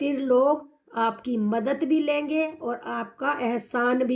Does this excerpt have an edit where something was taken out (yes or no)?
no